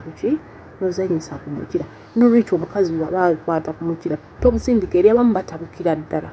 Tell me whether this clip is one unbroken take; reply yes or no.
no